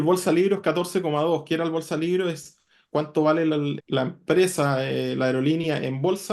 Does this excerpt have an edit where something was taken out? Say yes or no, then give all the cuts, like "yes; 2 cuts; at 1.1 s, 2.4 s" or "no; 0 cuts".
yes; 1 cut; at 3.8 s